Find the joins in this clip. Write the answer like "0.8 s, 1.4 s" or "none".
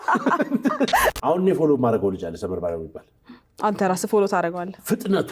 1.1 s